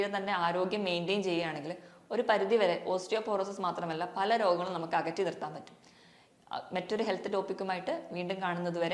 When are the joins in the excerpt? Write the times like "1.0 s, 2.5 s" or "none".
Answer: none